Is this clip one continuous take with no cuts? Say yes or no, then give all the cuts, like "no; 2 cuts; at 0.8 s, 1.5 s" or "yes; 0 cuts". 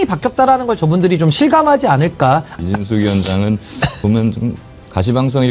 no; 1 cut; at 2.5 s